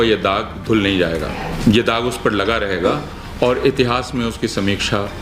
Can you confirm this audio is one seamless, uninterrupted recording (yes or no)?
no